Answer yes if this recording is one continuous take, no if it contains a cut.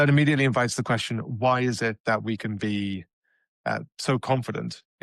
yes